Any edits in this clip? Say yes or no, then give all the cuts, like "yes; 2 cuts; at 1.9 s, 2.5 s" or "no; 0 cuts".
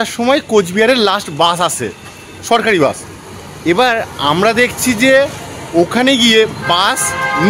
no; 0 cuts